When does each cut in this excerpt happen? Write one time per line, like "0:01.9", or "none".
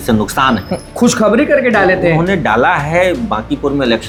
none